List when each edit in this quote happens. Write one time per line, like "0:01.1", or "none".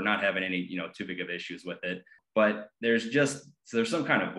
0:02.2